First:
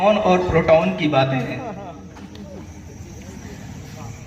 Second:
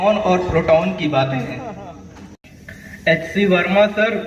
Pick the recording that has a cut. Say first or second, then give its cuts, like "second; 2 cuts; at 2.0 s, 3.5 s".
second; 1 cut; at 2.4 s